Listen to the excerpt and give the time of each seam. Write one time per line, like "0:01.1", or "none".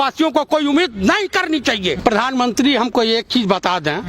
0:01.9